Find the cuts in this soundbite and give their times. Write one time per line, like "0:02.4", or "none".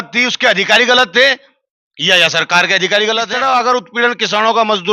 0:03.3